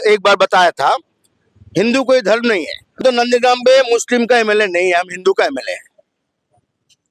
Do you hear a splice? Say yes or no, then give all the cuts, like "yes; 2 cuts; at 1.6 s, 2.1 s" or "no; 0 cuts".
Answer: yes; 1 cut; at 2.9 s